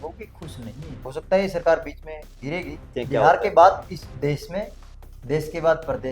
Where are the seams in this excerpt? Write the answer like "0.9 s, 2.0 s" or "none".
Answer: 1.0 s, 3.0 s